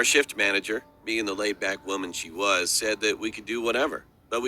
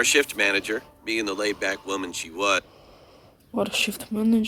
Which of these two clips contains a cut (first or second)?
first